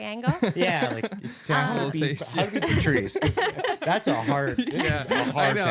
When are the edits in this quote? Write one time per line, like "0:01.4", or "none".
none